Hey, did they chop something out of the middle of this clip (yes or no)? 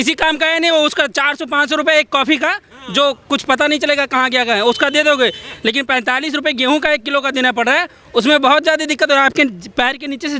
no